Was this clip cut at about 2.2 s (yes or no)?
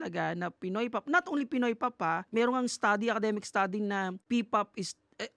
yes